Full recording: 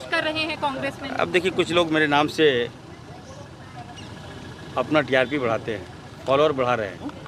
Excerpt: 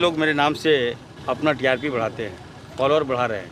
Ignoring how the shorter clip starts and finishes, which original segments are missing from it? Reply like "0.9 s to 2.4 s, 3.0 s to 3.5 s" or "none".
2.8 s to 4.6 s